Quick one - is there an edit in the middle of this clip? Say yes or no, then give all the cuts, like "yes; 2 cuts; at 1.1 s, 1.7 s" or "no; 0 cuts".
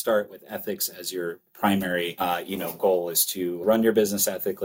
yes; 3 cuts; at 1.5 s, 2.1 s, 3.6 s